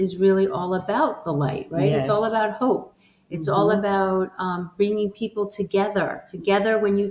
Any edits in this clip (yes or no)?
no